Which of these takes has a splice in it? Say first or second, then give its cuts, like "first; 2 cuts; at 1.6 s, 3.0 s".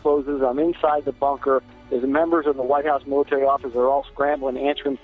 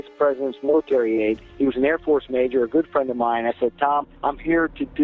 second; 2 cuts; at 1.5 s, 4.1 s